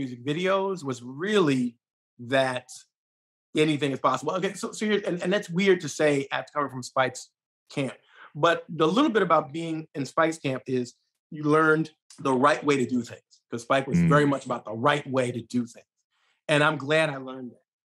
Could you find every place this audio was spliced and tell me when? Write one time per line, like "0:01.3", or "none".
0:12.0